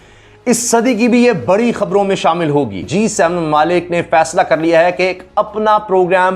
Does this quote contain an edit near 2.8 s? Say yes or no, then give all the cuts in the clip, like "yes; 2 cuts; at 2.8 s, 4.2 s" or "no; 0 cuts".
yes; 1 cut; at 2.8 s